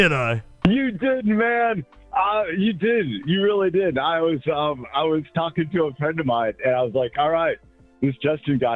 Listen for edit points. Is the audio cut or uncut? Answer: uncut